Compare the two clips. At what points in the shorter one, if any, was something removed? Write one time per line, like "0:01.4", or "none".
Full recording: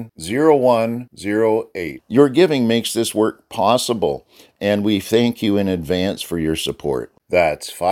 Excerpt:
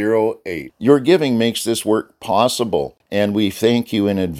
0:03.0